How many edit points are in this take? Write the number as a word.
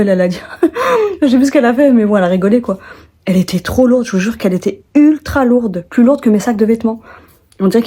zero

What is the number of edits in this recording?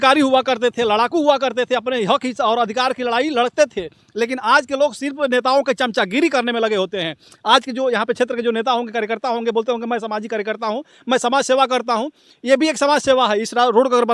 zero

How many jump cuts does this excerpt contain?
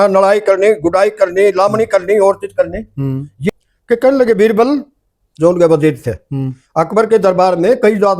one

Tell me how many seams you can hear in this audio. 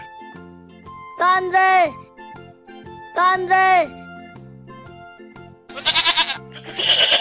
two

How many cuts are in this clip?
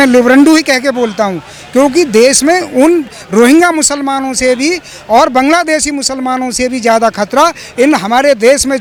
zero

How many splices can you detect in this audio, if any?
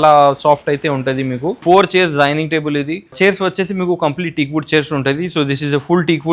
two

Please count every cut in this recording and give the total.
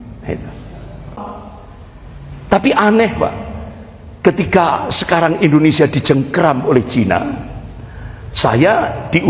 one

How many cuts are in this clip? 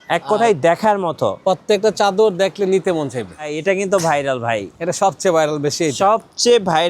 one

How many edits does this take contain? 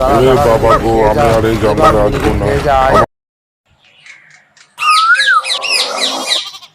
one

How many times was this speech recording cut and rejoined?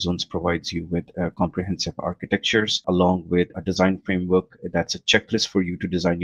two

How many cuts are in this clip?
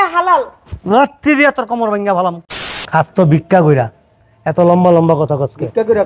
one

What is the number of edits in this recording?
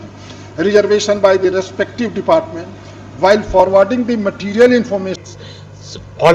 one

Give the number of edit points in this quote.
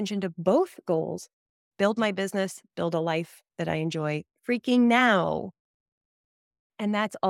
one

